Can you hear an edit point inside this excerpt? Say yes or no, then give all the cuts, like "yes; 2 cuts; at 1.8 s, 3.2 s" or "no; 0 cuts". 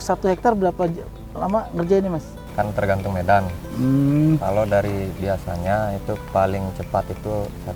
yes; 1 cut; at 2.4 s